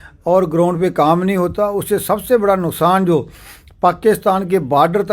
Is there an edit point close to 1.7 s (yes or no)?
no